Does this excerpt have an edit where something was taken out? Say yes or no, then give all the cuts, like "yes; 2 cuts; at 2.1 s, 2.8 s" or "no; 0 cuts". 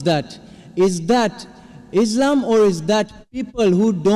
no; 0 cuts